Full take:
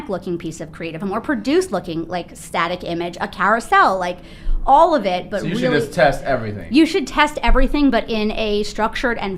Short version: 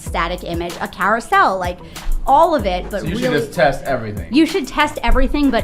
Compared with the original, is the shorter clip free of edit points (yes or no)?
yes